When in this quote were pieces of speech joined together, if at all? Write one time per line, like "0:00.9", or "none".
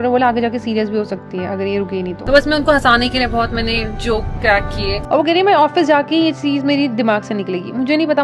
0:02.2
0:05.0